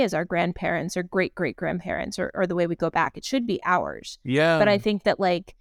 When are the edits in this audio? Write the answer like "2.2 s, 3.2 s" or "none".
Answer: none